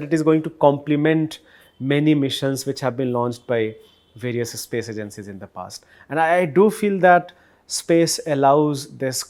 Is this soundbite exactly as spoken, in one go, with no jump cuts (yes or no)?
yes